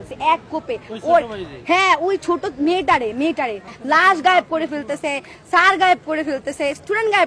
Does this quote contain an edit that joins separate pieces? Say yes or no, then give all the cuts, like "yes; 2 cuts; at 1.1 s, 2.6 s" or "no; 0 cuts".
yes; 1 cut; at 3.7 s